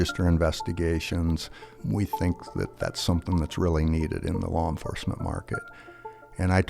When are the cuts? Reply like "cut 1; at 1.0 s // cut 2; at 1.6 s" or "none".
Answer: cut 1; at 1.7 s